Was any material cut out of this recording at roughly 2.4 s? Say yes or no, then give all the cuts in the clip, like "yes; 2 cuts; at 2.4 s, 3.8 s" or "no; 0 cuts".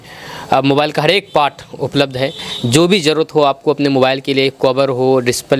no; 0 cuts